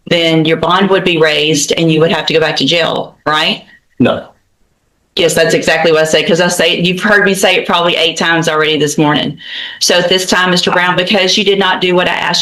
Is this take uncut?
yes; 0 cuts

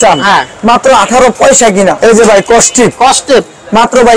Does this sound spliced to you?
yes; 1 cut; at 2.0 s

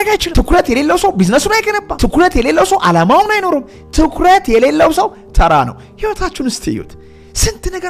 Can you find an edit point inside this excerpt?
no; 0 cuts

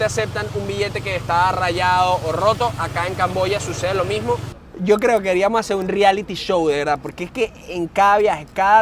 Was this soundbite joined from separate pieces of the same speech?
yes; 1 cut; at 4.6 s

